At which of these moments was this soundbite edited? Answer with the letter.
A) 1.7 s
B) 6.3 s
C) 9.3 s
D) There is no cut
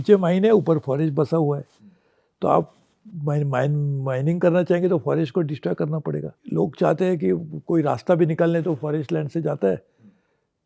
B